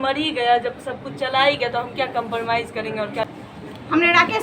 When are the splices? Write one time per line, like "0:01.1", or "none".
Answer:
0:03.4